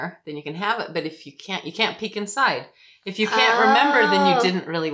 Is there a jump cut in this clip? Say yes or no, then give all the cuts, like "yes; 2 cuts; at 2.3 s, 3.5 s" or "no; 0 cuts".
no; 0 cuts